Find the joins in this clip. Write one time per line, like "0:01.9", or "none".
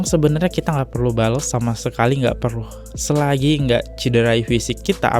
none

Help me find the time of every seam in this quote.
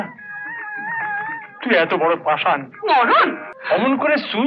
0:03.5

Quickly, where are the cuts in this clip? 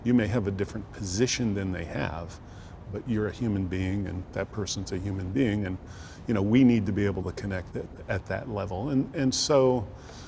none

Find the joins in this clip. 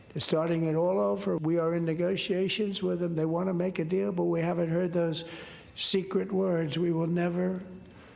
0:01.4

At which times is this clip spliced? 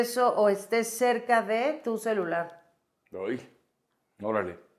none

